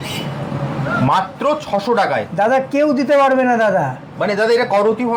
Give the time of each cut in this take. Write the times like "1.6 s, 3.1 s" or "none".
none